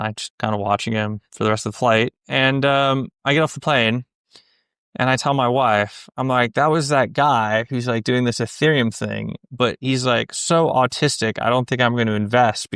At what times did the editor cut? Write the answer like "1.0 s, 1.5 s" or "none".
none